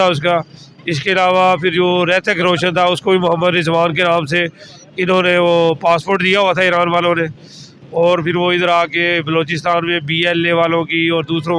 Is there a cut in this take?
no; 0 cuts

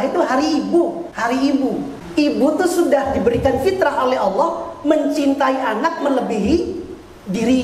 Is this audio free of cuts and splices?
no; 2 cuts; at 1.1 s, 2.0 s

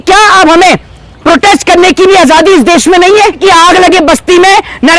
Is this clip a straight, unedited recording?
no; 1 cut; at 3.4 s

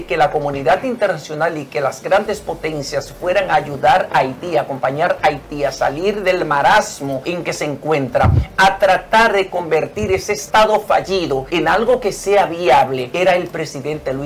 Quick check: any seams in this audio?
yes; 4 cuts; at 7.2 s, 10.4 s, 11.5 s, 13.1 s

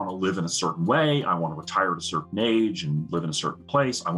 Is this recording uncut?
yes; 0 cuts

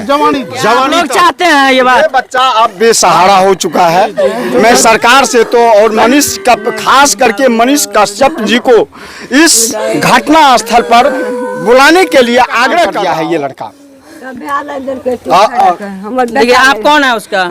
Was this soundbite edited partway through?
yes; 2 cuts; at 1.0 s, 12.9 s

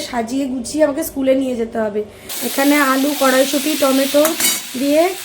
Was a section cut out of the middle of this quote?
yes; 1 cut; at 2.1 s

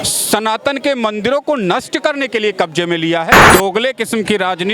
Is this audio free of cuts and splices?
no; 1 cut; at 3.5 s

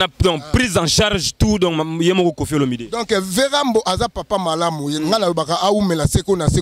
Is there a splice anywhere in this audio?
no; 0 cuts

